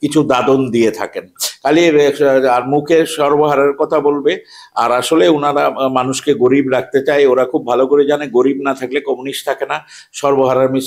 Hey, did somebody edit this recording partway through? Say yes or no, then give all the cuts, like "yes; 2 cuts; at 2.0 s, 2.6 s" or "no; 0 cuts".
no; 0 cuts